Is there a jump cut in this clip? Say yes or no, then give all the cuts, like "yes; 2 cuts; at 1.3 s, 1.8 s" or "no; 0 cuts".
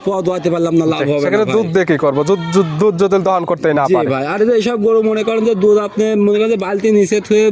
no; 0 cuts